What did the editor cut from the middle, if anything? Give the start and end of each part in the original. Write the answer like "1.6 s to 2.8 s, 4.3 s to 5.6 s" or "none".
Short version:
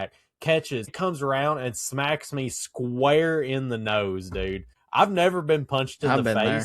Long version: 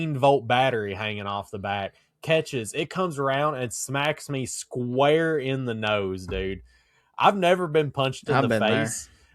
2.7 s to 2.9 s, 6.7 s to 7.0 s